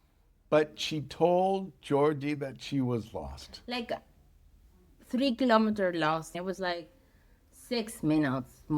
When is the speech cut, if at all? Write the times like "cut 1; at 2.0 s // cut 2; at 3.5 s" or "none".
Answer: cut 1; at 6.3 s